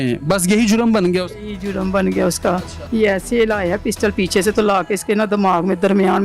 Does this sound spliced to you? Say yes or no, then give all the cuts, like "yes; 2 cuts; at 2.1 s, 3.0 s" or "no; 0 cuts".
yes; 1 cut; at 2.7 s